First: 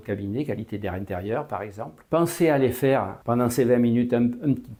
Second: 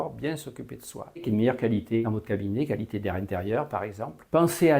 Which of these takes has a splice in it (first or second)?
second